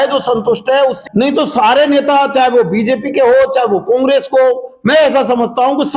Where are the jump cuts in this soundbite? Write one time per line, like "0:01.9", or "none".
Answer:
0:01.0